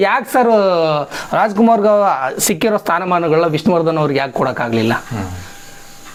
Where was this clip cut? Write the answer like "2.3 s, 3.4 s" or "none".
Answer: none